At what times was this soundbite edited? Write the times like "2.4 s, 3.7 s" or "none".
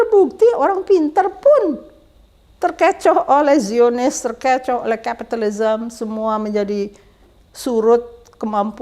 none